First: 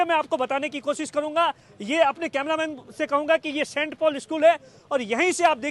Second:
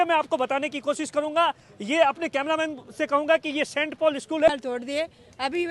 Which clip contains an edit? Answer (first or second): second